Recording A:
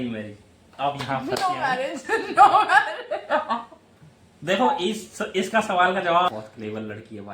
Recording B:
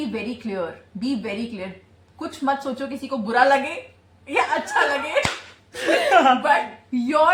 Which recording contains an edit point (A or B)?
A